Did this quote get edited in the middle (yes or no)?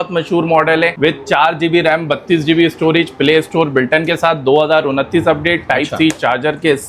yes